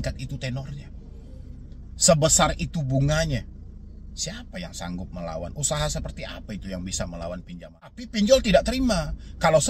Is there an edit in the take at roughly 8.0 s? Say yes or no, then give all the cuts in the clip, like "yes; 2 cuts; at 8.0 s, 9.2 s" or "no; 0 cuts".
yes; 1 cut; at 8.0 s